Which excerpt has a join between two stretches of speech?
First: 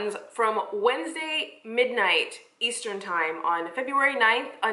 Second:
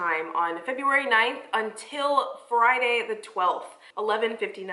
second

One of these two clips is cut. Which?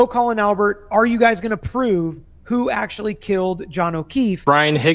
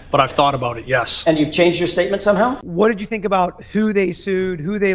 second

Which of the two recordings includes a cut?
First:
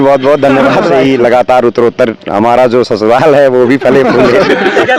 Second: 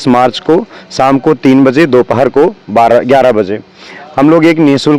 first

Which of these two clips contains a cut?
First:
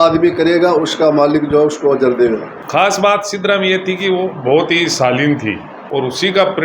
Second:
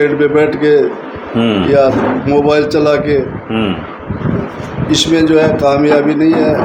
first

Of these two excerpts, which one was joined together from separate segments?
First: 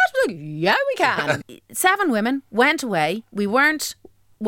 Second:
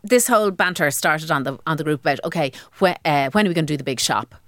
first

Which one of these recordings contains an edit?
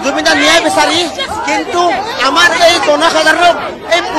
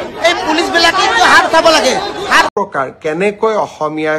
second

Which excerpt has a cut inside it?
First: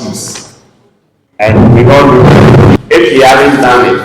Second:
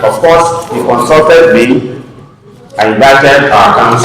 first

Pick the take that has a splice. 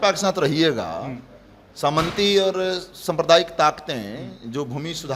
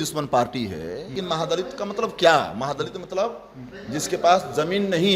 second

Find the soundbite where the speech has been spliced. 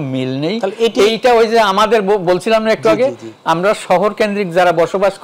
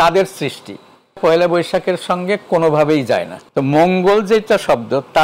second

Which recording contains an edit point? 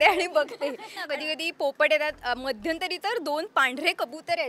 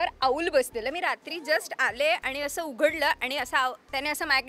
first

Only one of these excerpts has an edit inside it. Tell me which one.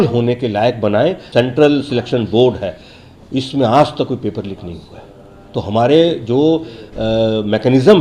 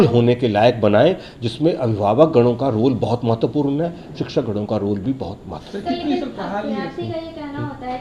first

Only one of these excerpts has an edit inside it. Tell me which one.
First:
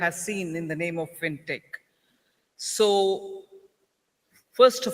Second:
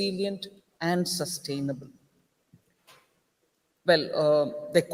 first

